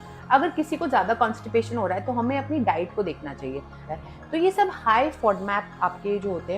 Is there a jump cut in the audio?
yes; 1 cut; at 3.8 s

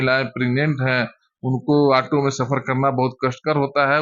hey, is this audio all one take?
yes; 0 cuts

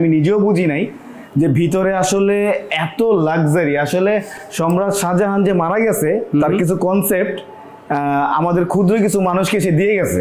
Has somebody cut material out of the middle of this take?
no; 0 cuts

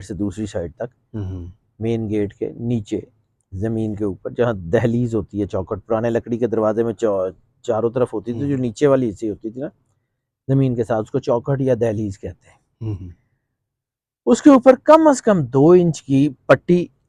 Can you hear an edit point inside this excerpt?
no; 0 cuts

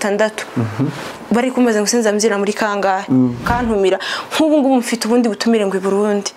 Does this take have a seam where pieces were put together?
yes; 1 cut; at 3.4 s

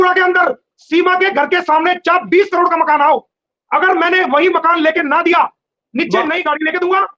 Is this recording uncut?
yes; 0 cuts

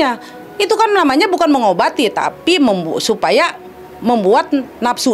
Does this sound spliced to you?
no; 0 cuts

